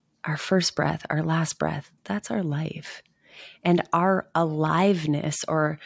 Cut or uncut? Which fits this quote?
cut